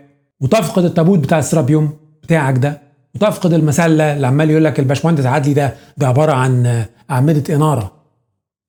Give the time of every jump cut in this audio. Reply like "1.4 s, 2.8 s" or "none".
none